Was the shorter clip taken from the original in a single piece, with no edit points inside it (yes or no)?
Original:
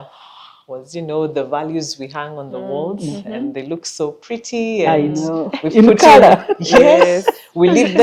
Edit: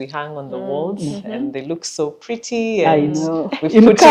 yes